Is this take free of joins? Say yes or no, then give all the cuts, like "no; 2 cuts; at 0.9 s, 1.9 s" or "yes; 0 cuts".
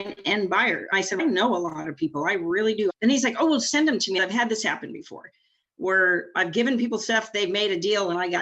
no; 3 cuts; at 1.0 s, 2.9 s, 4.2 s